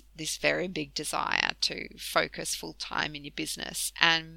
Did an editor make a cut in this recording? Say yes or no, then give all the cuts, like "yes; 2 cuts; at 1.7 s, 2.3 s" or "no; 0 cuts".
no; 0 cuts